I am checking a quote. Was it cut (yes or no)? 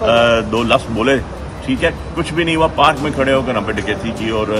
no